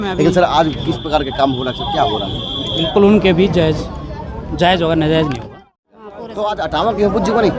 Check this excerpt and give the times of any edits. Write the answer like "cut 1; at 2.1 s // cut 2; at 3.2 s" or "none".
cut 1; at 5.8 s